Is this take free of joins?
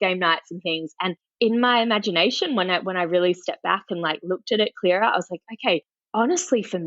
no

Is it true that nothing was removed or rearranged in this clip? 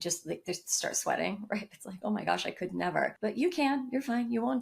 no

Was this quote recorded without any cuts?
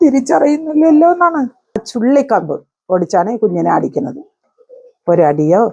no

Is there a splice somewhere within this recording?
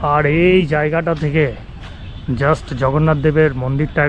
no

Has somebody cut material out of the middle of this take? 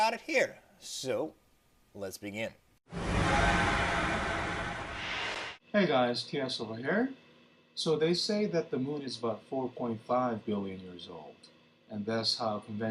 no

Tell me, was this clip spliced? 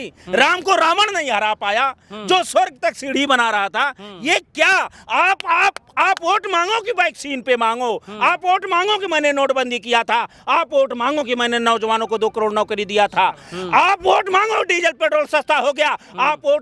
no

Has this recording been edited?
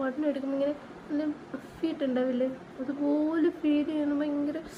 no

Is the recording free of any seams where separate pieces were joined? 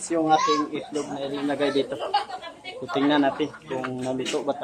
yes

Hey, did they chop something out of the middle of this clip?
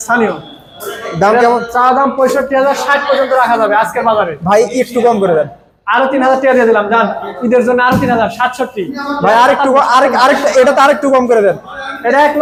no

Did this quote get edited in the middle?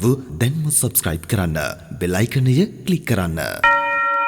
yes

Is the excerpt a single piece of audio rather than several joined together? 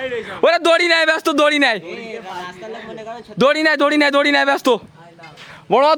yes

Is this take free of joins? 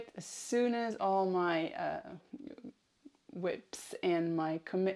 yes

